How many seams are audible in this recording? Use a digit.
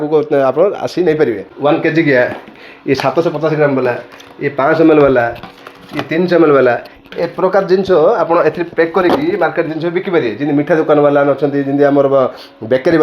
1